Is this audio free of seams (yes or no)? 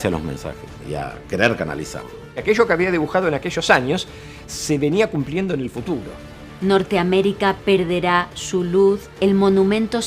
no